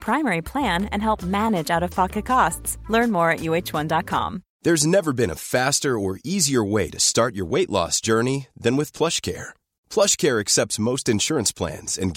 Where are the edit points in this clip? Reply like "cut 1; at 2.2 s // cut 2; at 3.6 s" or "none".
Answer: cut 1; at 4.4 s